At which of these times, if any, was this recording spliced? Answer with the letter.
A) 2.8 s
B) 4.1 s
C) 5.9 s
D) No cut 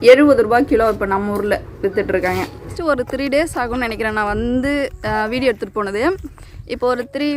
A